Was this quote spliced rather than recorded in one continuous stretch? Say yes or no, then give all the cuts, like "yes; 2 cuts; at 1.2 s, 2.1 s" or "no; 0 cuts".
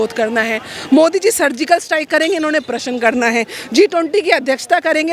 no; 0 cuts